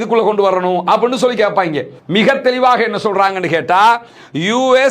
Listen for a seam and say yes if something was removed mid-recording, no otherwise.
yes